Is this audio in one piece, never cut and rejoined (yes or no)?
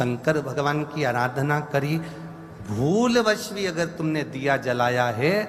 yes